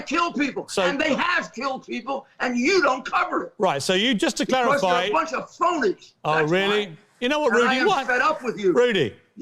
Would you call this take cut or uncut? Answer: cut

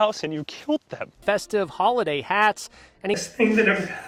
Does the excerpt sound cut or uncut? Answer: uncut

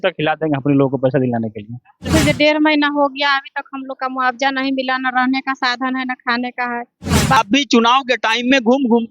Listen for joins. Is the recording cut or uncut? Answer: cut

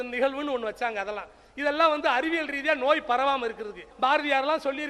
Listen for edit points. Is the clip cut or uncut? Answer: cut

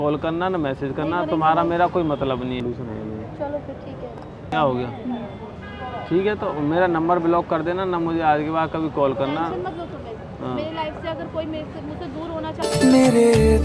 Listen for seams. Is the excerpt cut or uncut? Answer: cut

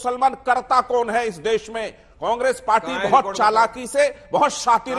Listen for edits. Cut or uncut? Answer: uncut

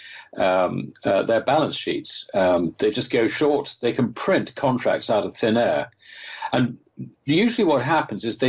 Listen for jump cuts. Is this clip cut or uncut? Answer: uncut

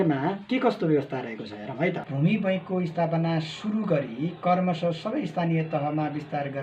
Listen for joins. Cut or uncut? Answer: cut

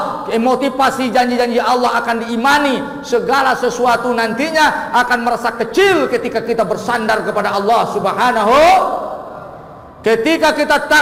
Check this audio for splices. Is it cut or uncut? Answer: uncut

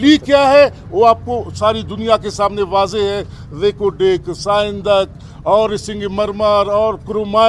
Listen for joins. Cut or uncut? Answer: uncut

